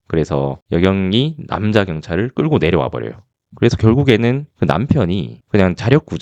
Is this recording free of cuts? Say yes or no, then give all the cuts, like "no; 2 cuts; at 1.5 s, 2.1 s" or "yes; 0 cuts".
yes; 0 cuts